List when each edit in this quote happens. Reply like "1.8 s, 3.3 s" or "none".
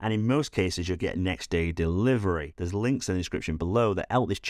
2.5 s